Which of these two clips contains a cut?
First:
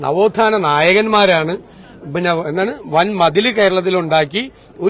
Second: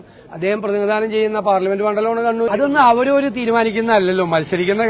second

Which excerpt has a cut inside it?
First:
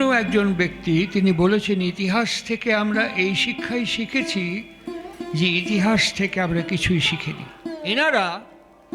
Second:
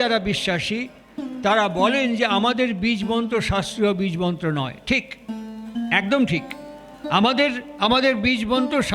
first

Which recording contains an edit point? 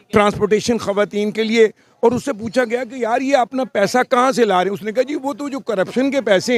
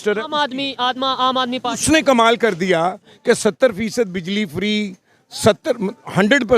second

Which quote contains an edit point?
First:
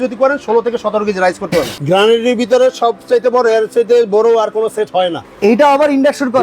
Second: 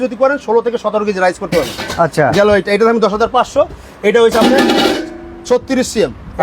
first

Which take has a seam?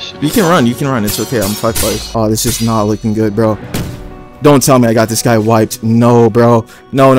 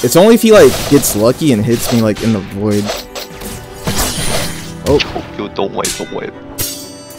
first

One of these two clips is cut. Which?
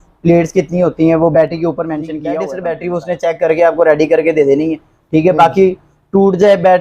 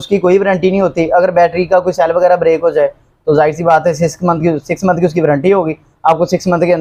first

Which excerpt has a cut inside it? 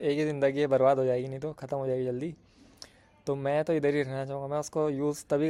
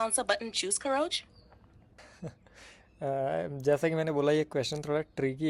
second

